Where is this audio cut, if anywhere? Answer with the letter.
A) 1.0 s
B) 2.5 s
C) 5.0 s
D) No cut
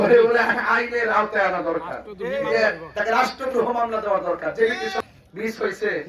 C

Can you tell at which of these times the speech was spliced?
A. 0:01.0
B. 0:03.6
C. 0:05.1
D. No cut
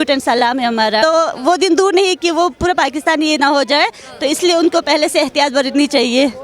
A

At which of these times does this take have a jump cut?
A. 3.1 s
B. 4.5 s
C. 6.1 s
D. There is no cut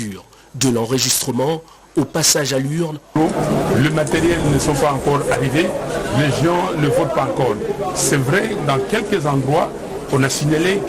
A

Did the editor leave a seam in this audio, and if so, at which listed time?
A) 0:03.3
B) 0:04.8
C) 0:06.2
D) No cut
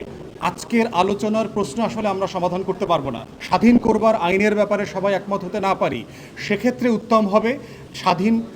A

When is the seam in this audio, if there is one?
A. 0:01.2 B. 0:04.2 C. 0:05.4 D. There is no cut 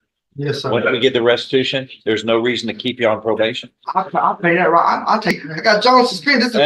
C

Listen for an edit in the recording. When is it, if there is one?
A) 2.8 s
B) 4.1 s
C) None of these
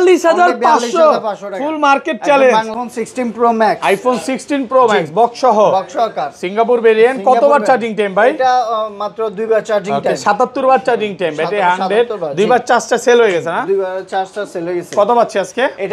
A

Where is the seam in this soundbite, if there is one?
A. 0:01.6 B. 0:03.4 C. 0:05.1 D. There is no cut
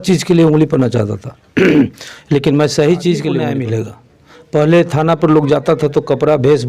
B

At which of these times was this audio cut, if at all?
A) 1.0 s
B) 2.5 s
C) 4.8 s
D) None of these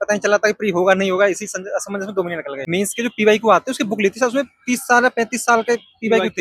B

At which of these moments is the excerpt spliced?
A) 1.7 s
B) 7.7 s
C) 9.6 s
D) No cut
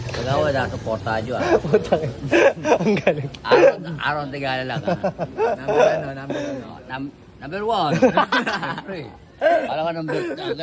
D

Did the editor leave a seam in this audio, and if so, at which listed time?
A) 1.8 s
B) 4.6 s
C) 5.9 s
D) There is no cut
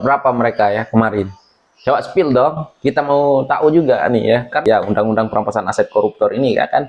B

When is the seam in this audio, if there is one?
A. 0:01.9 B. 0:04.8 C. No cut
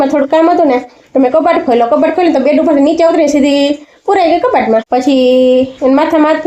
B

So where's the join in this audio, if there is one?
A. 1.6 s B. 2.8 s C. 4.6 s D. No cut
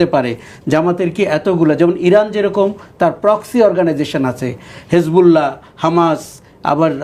D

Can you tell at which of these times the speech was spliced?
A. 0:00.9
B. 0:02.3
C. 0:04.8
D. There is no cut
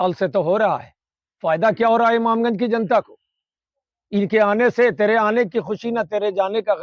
D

